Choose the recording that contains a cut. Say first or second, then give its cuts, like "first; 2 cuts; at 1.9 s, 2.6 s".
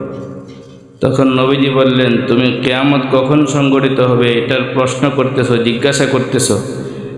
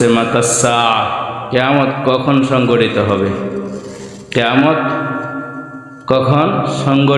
second; 1 cut; at 1.4 s